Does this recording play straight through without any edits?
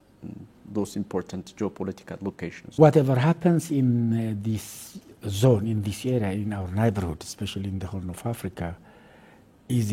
no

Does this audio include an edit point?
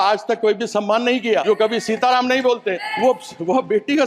yes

